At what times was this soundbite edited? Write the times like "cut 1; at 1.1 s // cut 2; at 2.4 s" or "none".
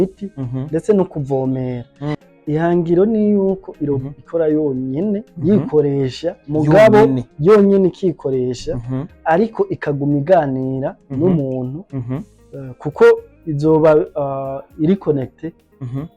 cut 1; at 2.2 s